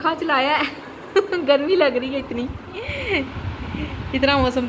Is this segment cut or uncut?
uncut